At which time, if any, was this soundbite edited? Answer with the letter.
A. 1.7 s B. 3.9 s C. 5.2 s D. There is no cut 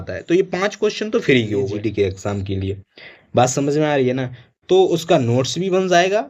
A